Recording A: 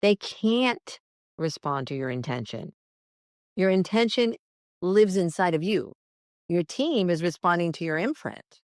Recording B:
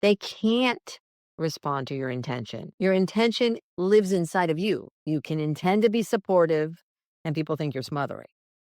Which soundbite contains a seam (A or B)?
B